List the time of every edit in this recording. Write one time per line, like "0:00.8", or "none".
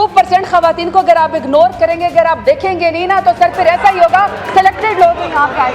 none

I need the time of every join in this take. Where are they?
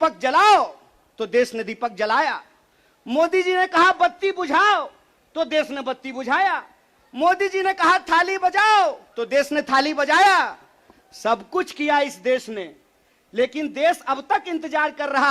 none

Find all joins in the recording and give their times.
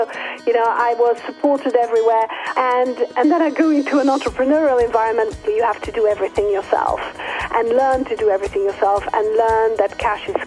0:03.0
0:05.4

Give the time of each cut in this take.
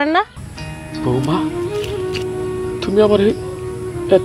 none

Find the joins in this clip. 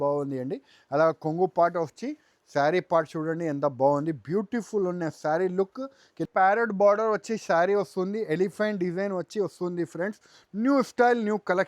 0:06.2

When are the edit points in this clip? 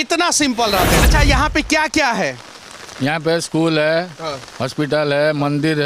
0:01.1

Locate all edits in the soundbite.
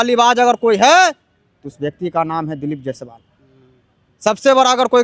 none

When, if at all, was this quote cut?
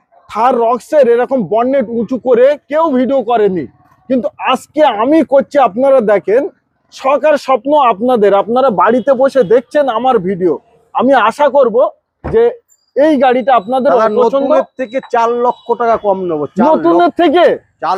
none

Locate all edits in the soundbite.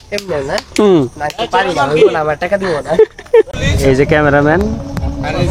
0:03.6

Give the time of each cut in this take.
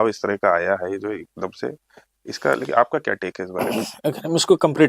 none

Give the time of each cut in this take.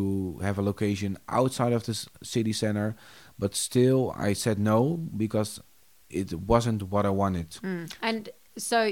0:06.1

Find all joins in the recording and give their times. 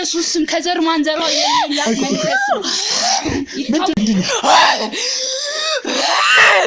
0:03.9

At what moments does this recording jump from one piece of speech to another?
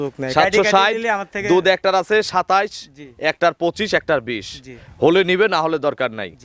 none

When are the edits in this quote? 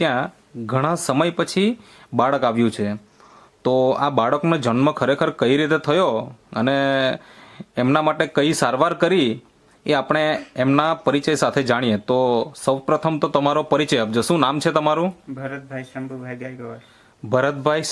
none

